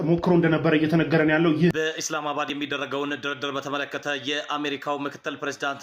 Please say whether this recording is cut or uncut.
cut